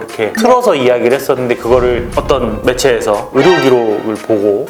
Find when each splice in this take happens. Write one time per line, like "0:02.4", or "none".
none